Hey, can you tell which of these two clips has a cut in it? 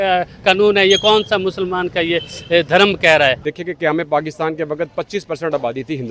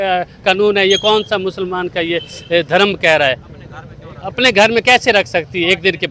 first; 1 cut; at 3.5 s

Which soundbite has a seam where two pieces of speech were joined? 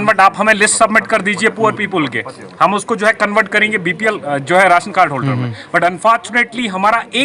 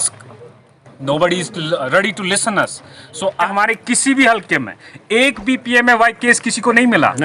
second; 1 cut; at 3.5 s

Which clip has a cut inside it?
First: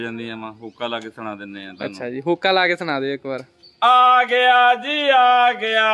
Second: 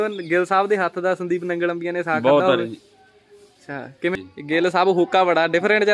second; 1 cut; at 4.2 s

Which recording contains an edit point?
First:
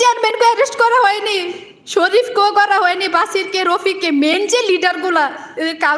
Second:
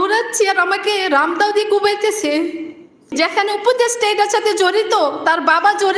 second; 1 cut; at 3.1 s

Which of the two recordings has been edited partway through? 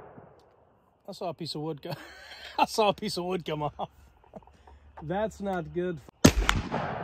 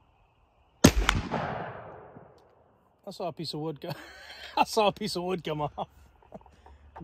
first; 1 cut; at 6.0 s

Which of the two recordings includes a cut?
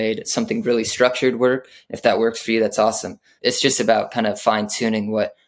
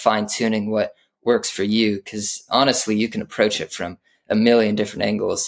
first; 1 cut; at 3.3 s

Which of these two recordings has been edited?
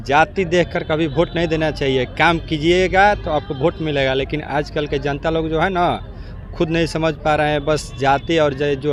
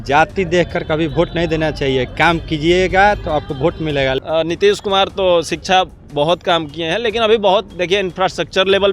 second; 1 cut; at 4.2 s

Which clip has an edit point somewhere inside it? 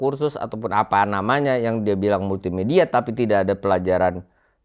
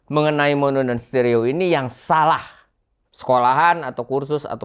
second; 1 cut; at 3.1 s

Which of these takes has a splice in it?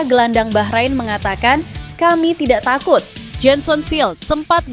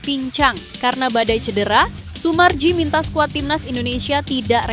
first; 1 cut; at 3.2 s

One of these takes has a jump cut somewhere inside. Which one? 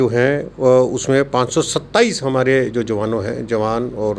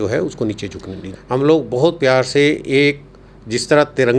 second; 1 cut; at 1.1 s

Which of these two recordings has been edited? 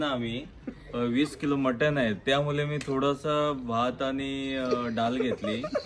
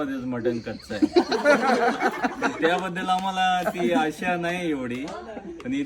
second; 1 cut; at 1.6 s

